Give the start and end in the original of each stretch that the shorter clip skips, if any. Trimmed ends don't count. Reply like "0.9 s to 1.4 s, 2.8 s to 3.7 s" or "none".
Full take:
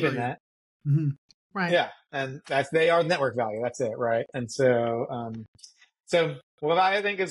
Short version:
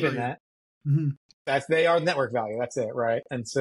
1.3 s to 2.4 s